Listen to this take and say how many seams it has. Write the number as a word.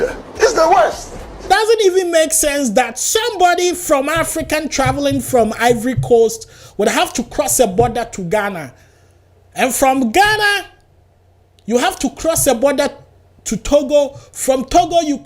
one